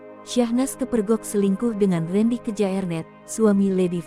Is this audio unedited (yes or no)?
yes